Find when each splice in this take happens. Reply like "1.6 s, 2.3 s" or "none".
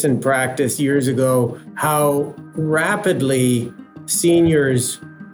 1.7 s, 2.4 s